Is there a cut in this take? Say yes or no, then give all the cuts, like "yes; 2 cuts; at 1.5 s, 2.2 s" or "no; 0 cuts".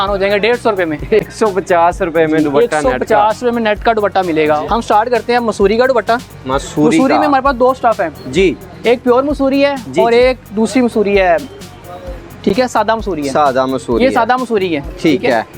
no; 0 cuts